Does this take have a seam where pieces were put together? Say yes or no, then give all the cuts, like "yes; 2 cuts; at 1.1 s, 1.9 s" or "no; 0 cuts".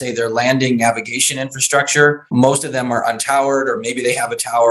yes; 1 cut; at 2.3 s